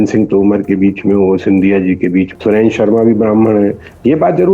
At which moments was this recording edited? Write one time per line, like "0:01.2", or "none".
0:02.3